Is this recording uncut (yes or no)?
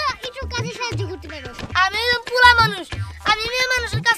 no